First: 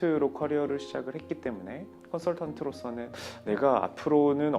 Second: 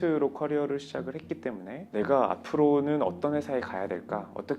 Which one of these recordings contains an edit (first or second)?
second